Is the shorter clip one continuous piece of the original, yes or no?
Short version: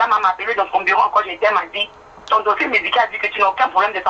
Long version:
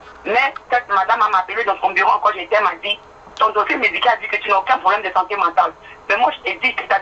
yes